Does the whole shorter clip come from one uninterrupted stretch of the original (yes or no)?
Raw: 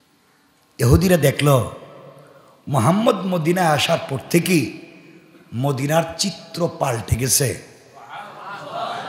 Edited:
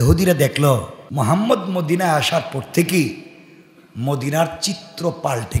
no